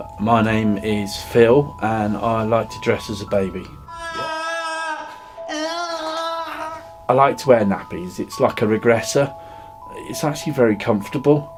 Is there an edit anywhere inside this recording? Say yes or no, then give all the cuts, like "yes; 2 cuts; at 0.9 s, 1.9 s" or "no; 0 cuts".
no; 0 cuts